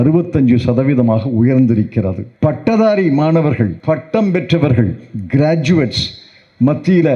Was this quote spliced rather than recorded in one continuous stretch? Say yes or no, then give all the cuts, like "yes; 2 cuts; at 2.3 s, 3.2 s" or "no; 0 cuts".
yes; 2 cuts; at 2.2 s, 3.8 s